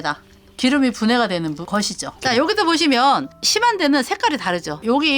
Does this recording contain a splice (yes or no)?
yes